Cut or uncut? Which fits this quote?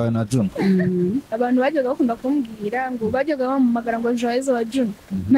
cut